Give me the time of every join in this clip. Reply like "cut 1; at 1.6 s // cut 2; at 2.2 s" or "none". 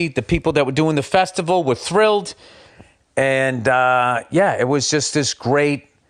none